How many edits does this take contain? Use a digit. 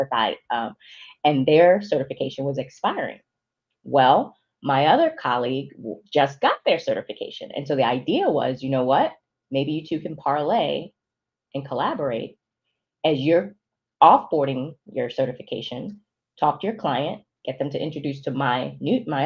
0